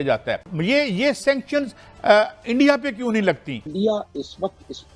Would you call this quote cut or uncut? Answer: cut